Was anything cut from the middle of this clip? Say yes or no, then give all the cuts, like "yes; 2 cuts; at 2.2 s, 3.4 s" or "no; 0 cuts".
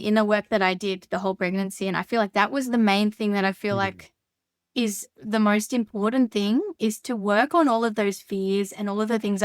no; 0 cuts